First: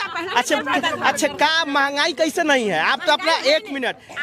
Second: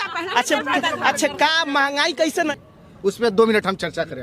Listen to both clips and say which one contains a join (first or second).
second